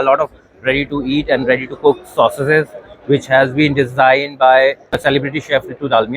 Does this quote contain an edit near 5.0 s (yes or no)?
yes